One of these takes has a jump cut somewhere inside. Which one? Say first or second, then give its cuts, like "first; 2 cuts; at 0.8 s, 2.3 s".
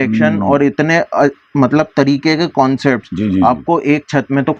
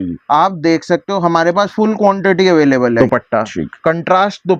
second; 1 cut; at 3.0 s